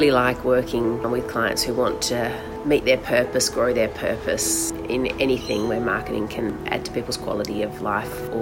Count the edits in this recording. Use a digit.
0